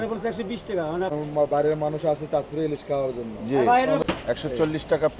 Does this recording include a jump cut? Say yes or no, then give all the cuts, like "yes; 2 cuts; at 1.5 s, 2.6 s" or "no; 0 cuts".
yes; 2 cuts; at 1.1 s, 4.0 s